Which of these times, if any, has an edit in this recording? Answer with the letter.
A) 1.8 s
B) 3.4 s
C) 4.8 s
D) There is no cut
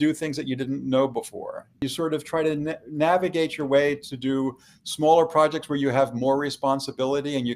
A